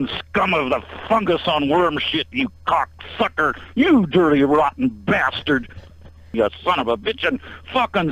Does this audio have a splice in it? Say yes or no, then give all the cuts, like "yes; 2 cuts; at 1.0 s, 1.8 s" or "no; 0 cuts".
yes; 1 cut; at 6.3 s